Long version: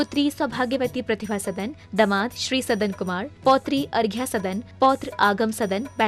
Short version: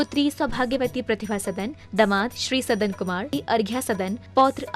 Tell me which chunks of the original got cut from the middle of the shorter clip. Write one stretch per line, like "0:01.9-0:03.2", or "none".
0:03.3-0:03.8